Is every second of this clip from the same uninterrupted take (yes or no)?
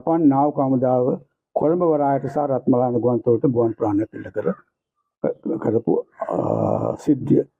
yes